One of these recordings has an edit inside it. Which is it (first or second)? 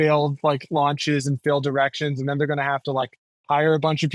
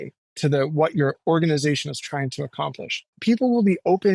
second